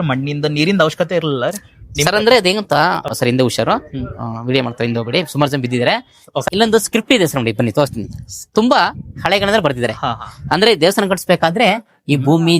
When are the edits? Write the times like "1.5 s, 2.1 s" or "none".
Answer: 3.1 s, 6.4 s